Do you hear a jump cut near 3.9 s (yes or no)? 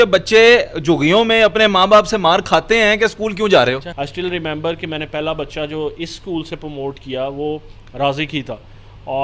yes